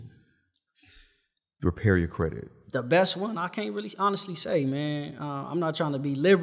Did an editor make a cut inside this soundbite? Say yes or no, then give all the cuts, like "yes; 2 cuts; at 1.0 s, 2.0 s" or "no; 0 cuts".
yes; 1 cut; at 2.5 s